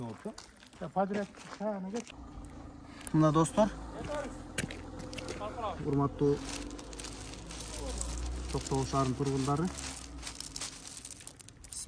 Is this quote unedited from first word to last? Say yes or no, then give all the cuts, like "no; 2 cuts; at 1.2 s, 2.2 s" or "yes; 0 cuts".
yes; 0 cuts